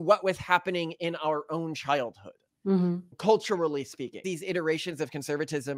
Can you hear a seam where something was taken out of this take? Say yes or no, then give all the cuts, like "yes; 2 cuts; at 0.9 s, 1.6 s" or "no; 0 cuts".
yes; 1 cut; at 4.2 s